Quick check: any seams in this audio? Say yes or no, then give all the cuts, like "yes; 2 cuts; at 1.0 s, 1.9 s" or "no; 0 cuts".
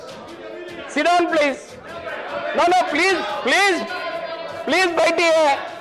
no; 0 cuts